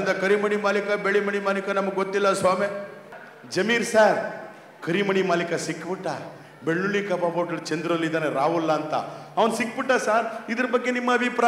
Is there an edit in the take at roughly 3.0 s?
yes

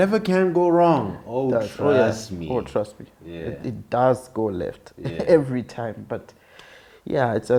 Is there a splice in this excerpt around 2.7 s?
no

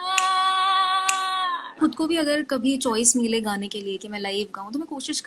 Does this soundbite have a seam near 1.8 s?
yes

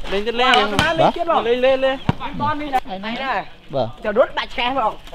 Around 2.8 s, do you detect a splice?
yes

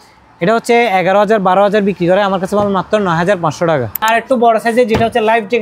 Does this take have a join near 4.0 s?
yes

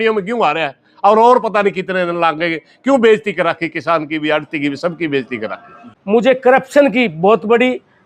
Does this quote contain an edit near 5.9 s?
yes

